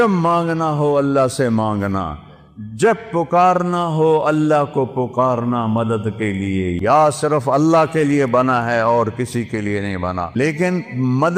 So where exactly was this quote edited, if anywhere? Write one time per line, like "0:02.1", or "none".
0:06.8
0:10.4